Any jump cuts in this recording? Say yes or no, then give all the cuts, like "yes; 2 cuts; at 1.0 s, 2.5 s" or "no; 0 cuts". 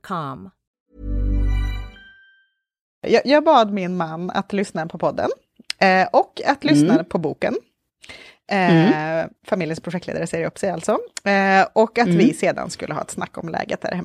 yes; 1 cut; at 2.9 s